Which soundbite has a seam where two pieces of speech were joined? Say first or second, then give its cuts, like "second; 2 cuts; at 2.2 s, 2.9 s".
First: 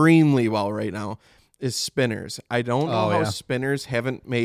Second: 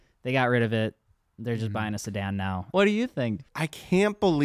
second; 2 cuts; at 2.7 s, 3.4 s